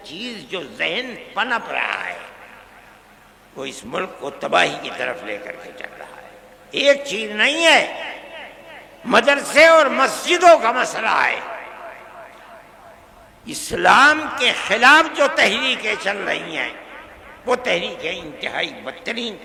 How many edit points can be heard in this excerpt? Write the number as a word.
zero